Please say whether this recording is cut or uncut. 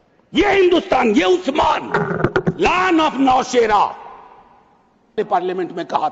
cut